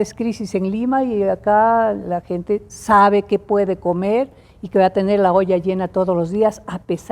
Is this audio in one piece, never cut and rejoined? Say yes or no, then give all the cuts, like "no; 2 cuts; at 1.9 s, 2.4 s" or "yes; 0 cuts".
yes; 0 cuts